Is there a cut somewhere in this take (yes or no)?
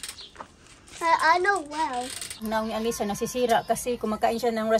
yes